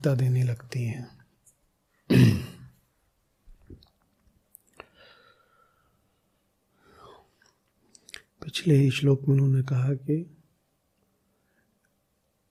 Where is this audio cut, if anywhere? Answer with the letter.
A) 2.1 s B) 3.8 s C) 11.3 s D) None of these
D